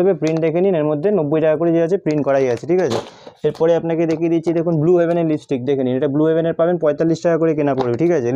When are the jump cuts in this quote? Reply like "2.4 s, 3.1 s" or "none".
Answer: none

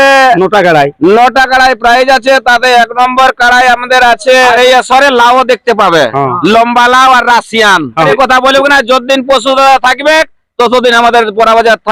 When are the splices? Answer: 4.5 s, 8.1 s

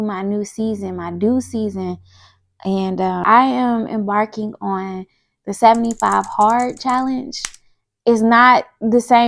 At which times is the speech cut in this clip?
3.2 s

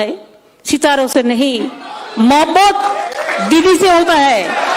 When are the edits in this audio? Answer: none

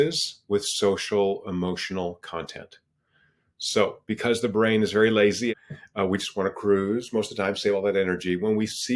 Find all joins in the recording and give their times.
5.5 s

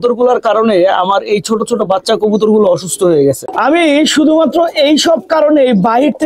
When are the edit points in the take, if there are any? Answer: 3.4 s

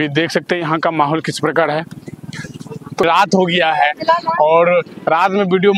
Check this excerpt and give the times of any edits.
3.0 s

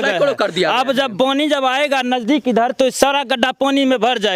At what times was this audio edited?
none

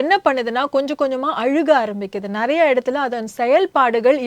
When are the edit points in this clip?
none

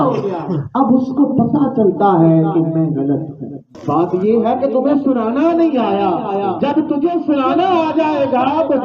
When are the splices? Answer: 3.7 s

